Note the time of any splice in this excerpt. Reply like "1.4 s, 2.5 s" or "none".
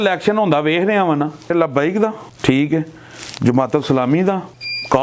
1.5 s